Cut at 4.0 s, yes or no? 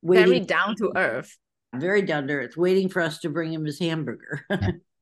no